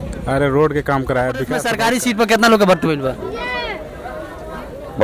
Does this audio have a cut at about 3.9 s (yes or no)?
no